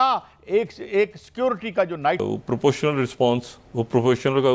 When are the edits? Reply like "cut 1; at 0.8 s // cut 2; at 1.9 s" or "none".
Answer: cut 1; at 2.2 s